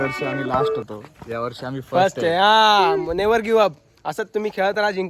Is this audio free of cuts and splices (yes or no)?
yes